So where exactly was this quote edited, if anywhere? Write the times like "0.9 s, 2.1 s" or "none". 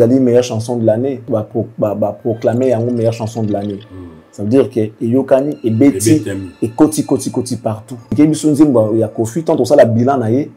1.3 s, 8.1 s